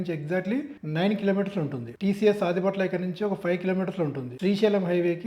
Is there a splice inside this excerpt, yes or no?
yes